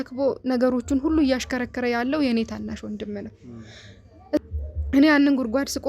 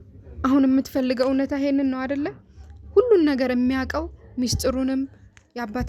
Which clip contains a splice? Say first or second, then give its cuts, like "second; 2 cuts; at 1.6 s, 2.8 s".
first; 1 cut; at 4.4 s